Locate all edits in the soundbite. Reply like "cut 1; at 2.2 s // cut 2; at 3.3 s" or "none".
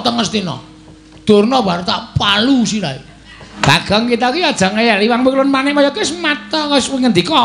cut 1; at 3.5 s